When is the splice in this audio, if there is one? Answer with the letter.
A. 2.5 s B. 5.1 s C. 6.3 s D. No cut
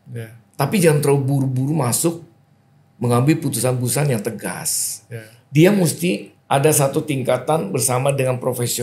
C